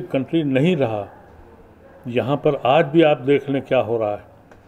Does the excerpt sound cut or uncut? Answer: uncut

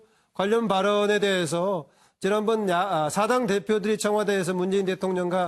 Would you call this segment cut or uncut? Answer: cut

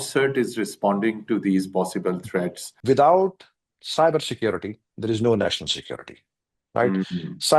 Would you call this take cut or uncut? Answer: cut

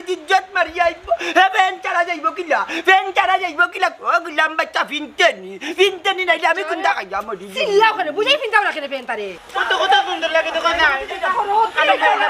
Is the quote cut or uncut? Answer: cut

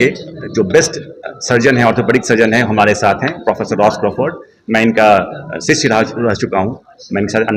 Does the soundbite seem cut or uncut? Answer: uncut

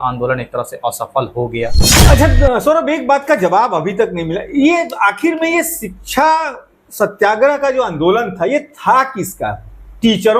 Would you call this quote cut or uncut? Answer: cut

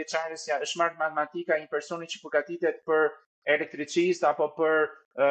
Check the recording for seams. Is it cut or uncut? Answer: uncut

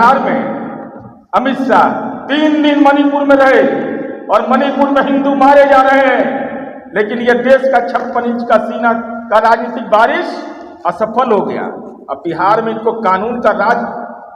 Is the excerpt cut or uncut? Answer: uncut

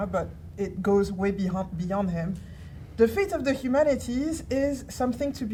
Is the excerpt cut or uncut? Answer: uncut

